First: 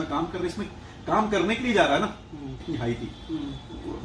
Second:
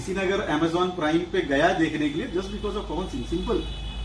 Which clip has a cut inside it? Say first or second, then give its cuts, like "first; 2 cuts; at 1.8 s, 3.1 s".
first; 1 cut; at 2.6 s